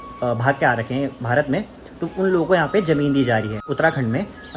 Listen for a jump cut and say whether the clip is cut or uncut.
cut